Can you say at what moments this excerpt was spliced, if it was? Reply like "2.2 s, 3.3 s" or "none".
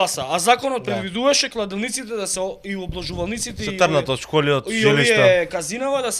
none